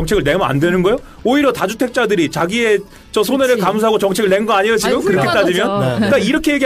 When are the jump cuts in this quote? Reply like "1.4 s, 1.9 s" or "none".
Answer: none